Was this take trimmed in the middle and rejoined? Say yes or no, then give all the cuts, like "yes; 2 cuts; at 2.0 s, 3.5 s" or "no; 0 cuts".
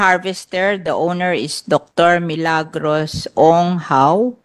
no; 0 cuts